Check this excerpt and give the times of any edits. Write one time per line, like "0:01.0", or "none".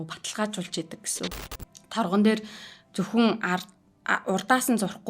0:01.4